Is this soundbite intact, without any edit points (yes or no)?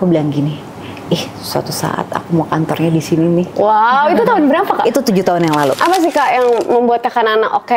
no